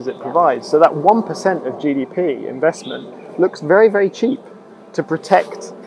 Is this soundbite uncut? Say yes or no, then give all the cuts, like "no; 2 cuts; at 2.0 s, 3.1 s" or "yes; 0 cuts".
yes; 0 cuts